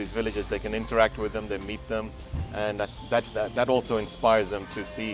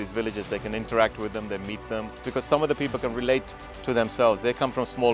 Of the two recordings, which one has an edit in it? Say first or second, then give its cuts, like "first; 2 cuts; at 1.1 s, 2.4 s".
second; 1 cut; at 2.2 s